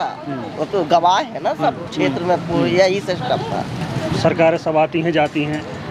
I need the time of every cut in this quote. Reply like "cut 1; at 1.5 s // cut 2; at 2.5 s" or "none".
cut 1; at 4.1 s